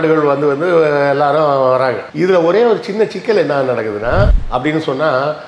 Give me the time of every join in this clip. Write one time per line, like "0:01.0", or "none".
0:04.4